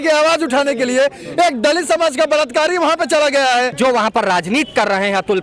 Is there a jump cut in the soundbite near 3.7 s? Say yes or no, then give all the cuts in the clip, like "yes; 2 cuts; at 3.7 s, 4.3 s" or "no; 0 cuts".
yes; 1 cut; at 3.7 s